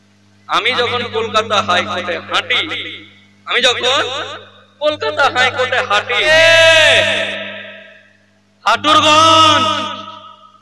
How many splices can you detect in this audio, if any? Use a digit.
1